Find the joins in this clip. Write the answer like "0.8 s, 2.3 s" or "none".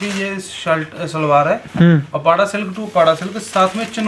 none